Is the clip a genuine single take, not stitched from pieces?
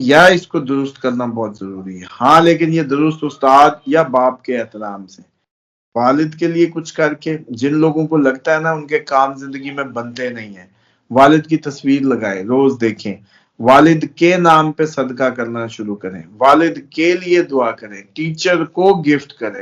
yes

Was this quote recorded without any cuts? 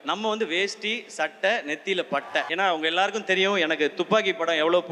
no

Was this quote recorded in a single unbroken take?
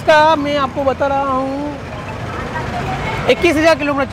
yes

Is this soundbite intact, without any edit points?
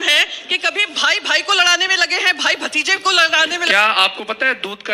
no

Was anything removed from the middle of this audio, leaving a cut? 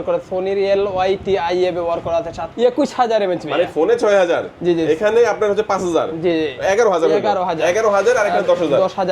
yes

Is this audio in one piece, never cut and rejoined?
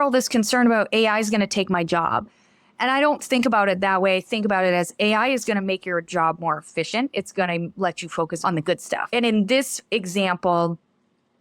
no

